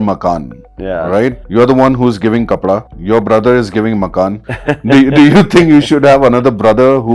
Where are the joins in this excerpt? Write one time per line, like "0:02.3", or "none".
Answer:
0:01.4
0:02.9
0:04.5